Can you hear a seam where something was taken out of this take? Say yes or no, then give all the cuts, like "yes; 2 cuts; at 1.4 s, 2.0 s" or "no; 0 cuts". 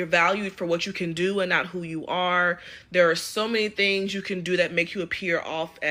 no; 0 cuts